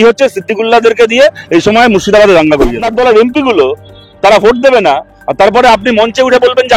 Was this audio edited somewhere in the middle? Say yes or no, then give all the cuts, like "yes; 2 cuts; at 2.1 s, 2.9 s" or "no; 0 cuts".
yes; 1 cut; at 2.8 s